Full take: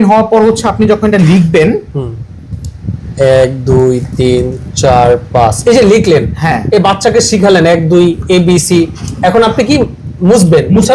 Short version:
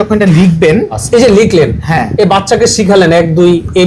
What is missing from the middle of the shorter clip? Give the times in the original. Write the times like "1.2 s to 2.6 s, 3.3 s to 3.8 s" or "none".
1.9 s to 5.6 s